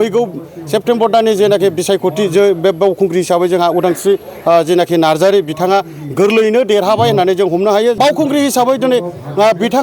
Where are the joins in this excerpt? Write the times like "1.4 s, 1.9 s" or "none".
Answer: 8.0 s